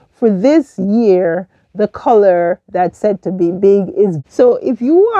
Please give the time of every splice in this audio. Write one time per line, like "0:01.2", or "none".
0:04.2